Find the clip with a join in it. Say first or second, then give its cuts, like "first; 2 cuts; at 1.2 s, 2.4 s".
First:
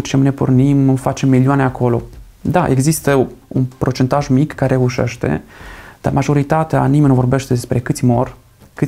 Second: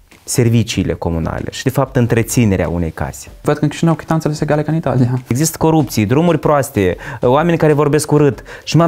second; 2 cuts; at 3.4 s, 5.3 s